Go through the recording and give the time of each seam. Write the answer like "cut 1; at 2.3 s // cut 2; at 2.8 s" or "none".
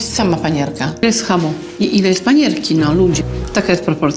cut 1; at 1.0 s

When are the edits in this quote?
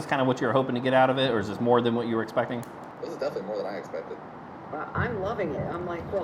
cut 1; at 2.8 s

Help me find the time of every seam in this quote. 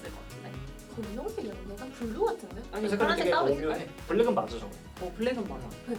none

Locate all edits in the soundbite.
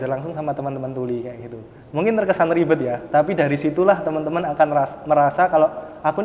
none

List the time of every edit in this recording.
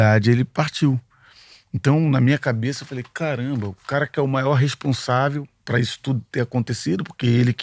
none

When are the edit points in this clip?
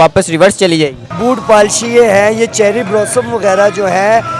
cut 1; at 1.1 s

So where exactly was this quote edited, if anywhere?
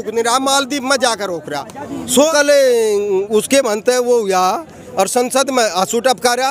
cut 1; at 2.2 s

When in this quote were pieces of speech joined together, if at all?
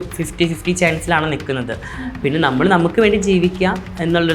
none

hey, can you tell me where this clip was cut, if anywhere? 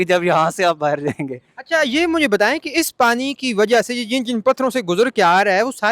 none

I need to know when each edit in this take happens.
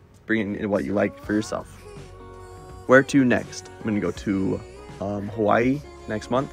none

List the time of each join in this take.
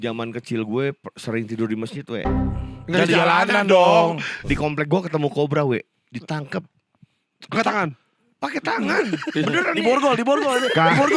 cut 1; at 4.4 s

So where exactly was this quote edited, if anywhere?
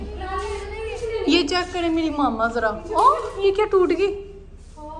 none

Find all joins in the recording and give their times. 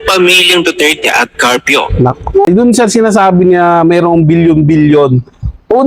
cut 1; at 2.5 s

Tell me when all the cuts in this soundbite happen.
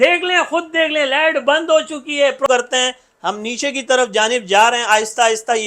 cut 1; at 2.5 s

